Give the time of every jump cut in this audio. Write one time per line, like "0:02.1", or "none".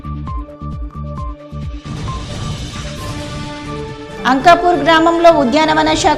0:03.2